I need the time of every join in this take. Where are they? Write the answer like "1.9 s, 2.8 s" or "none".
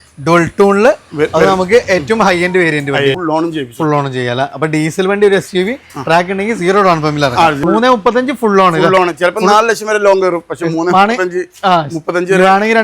3.2 s, 7.6 s